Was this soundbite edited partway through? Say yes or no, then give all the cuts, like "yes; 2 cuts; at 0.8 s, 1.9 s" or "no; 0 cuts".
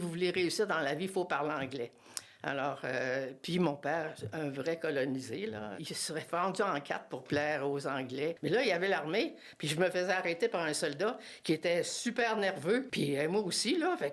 yes; 3 cuts; at 5.7 s, 8.4 s, 12.9 s